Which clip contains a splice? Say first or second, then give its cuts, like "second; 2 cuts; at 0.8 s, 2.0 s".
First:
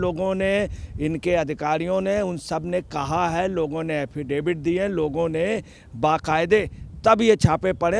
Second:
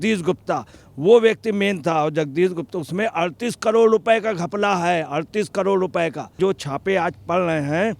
second; 1 cut; at 6.3 s